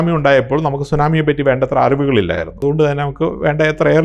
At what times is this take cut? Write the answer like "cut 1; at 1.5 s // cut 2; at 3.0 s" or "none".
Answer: cut 1; at 2.5 s